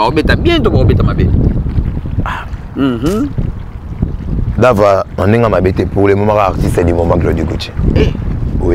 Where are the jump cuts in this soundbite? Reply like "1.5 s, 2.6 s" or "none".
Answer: none